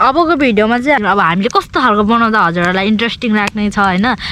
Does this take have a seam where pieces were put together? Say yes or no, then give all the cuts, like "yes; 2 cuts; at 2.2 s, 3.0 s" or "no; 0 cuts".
yes; 1 cut; at 1.0 s